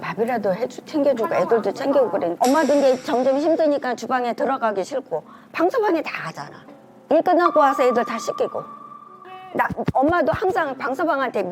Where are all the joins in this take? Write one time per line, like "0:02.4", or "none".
0:02.3